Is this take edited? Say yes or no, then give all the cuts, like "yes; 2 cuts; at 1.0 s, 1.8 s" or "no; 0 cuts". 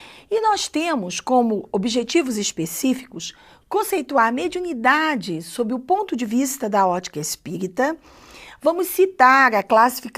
yes; 1 cut; at 6.1 s